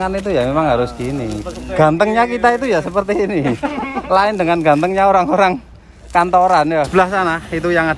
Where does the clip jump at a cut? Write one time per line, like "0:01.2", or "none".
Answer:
0:06.9